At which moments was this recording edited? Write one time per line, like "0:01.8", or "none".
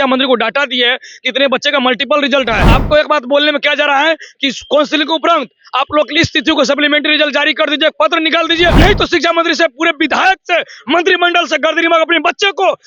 0:02.7
0:08.7